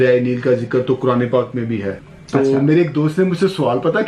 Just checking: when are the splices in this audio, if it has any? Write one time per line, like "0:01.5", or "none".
0:01.9